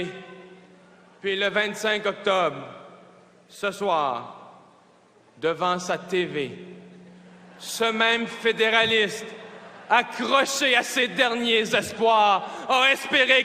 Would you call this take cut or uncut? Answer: cut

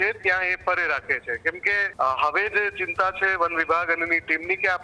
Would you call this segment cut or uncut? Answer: cut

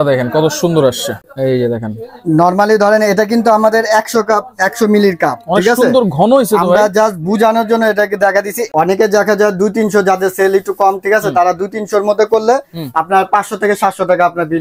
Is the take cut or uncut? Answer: cut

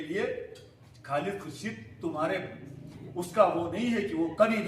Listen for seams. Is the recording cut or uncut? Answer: uncut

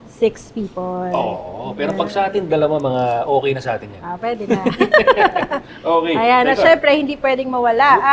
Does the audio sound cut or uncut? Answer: uncut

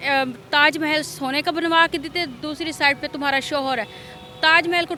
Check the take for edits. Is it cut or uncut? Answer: uncut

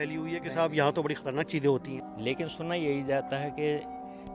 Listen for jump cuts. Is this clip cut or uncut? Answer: cut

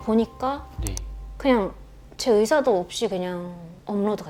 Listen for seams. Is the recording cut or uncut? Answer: uncut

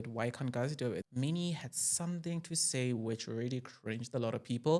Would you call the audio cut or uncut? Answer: cut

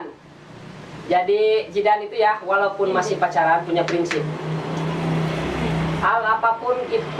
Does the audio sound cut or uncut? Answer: uncut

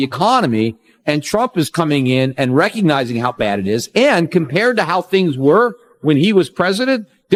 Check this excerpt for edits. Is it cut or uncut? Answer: uncut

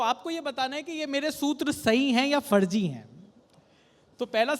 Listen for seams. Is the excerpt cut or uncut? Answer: uncut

